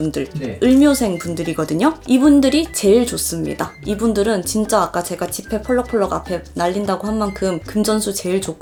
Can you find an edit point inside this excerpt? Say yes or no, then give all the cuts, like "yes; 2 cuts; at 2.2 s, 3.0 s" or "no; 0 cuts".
no; 0 cuts